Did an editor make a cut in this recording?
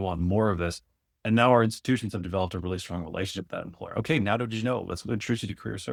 no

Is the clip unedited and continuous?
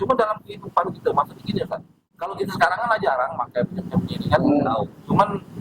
no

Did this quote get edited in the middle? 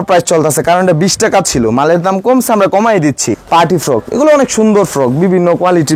yes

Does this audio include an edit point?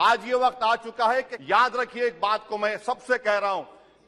yes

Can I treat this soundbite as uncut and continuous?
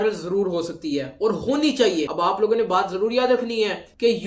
no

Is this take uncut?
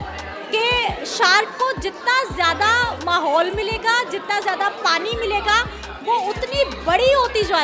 yes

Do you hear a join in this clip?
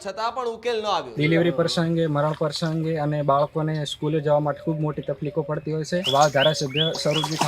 yes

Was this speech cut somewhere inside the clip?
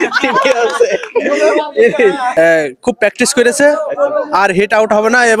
yes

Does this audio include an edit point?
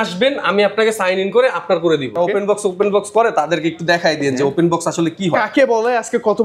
yes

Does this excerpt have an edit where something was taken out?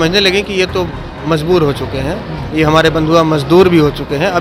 no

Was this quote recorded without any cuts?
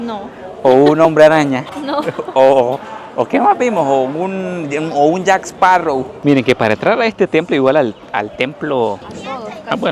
no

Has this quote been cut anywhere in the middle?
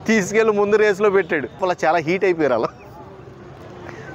yes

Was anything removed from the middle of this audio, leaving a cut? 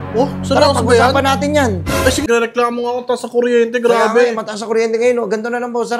yes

